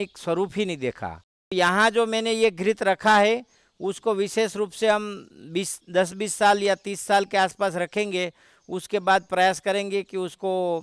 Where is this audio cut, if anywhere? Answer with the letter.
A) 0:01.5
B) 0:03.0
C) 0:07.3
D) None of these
A